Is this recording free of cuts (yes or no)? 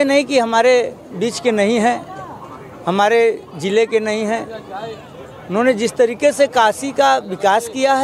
yes